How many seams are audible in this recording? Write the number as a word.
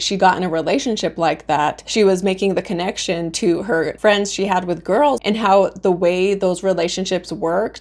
two